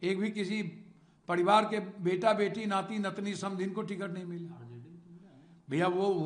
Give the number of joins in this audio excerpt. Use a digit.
0